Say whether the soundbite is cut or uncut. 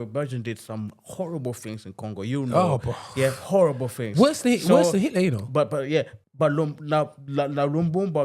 cut